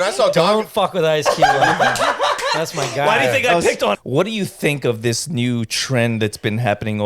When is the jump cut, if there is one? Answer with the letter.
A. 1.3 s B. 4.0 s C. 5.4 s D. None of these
B